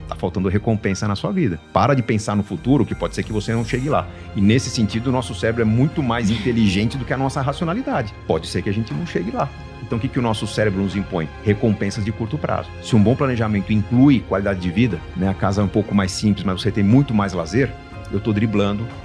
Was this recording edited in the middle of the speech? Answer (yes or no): no